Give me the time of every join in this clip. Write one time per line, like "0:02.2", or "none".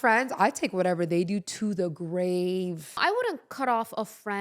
0:03.0